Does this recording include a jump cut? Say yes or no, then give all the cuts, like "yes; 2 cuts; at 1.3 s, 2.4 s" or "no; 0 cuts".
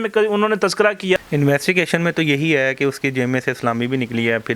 yes; 1 cut; at 1.2 s